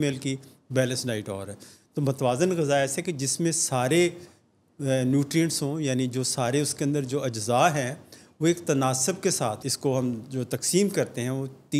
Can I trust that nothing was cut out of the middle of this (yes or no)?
no